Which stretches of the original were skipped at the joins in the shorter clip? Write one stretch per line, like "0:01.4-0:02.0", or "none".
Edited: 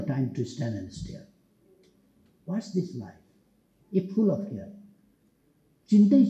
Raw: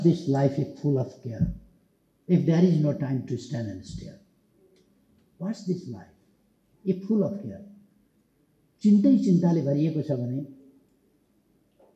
none